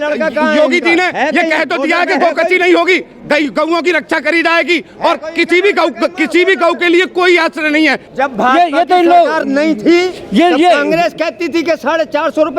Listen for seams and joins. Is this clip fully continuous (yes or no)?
no